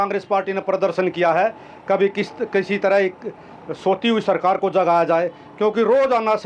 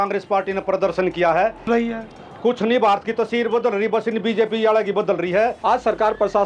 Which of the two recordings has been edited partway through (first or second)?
second